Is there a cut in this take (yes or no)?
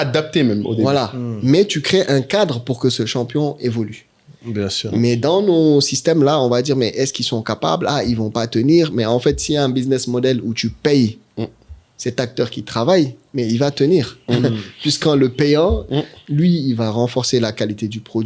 no